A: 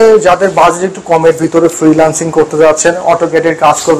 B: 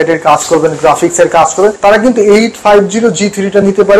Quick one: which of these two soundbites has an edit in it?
B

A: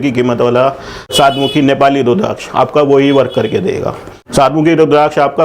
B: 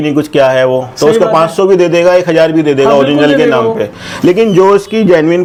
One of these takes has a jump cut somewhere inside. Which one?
A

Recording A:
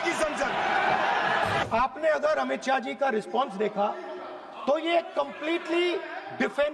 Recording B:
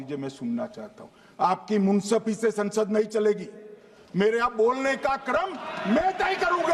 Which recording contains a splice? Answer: A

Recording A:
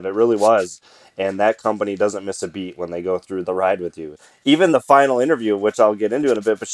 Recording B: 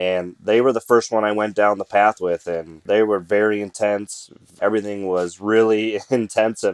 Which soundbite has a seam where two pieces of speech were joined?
A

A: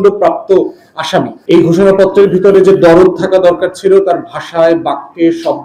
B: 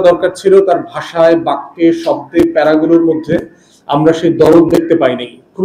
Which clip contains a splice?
A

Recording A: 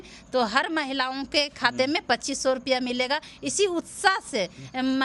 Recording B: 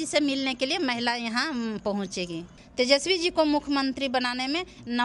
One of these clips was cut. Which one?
B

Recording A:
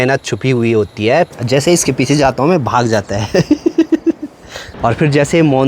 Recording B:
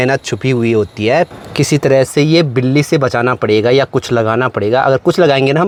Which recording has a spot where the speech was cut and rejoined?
A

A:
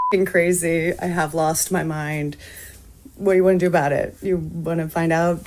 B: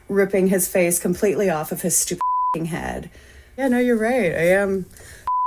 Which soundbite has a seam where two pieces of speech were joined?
B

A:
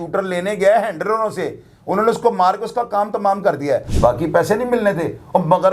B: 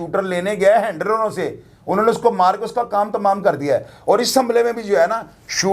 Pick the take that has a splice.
A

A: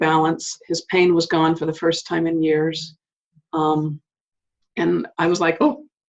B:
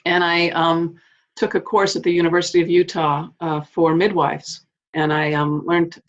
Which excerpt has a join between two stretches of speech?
B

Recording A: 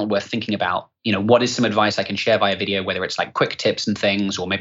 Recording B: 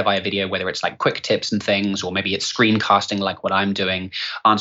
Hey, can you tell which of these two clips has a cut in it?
A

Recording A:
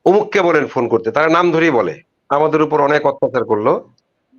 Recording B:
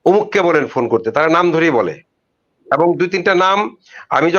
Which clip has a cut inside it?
A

